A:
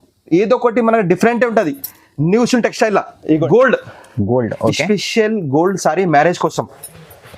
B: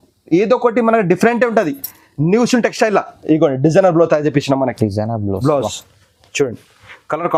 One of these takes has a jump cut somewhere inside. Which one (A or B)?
A